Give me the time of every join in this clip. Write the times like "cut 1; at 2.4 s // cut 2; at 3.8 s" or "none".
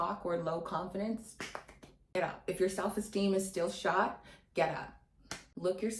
none